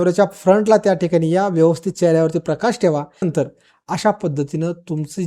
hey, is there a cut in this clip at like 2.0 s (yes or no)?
no